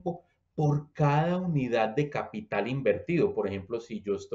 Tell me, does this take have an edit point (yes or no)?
no